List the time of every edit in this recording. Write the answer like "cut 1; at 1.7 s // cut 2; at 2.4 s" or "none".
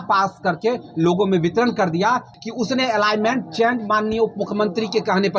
cut 1; at 2.4 s